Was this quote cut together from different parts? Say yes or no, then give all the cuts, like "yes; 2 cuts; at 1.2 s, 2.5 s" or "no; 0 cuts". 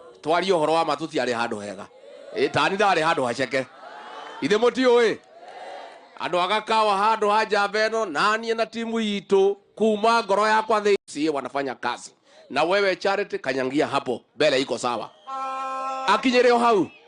yes; 1 cut; at 11.0 s